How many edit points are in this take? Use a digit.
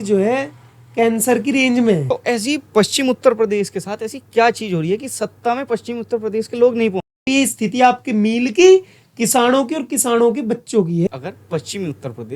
3